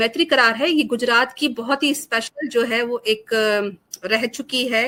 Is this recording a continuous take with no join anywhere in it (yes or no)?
yes